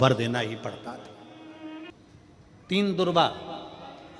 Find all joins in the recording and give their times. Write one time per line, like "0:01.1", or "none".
0:01.9

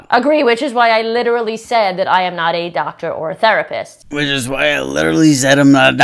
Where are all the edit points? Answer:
none

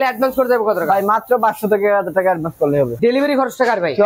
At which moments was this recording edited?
0:03.0

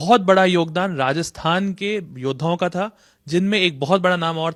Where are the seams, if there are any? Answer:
none

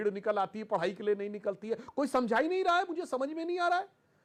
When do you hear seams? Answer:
none

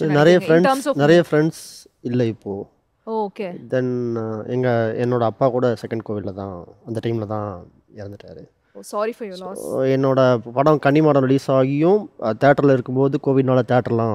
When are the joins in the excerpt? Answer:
none

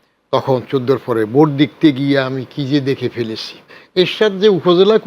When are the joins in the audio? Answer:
0:03.8

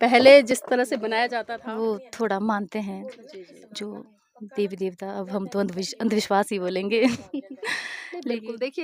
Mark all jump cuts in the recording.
0:01.3

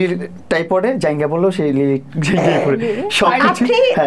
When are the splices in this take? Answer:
none

